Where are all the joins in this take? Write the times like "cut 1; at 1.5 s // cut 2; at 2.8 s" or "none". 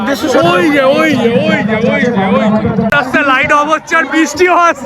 cut 1; at 2.9 s